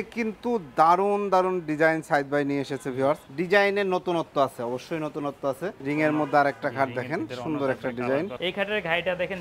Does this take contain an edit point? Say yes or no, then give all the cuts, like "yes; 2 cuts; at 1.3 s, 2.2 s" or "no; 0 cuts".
yes; 3 cuts; at 3.3 s, 5.8 s, 8.3 s